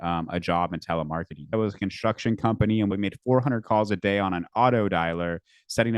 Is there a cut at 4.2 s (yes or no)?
no